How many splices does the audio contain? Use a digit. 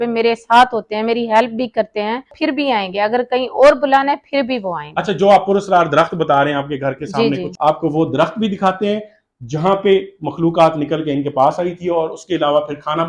2